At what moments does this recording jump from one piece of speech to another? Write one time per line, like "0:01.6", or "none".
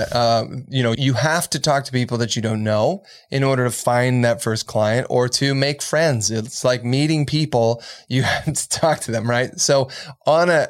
0:01.0